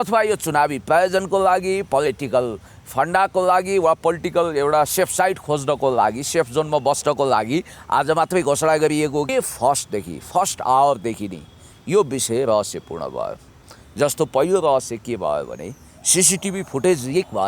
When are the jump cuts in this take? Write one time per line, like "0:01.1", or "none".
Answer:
0:09.3